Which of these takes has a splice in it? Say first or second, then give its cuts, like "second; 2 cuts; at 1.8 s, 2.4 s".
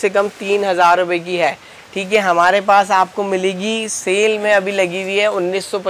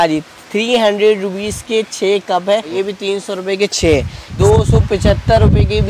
second; 2 cuts; at 2.7 s, 4.3 s